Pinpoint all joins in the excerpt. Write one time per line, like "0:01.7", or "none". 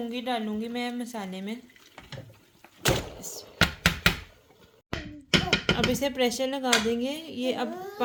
none